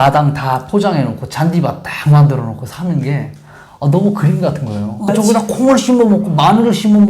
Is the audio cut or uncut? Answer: cut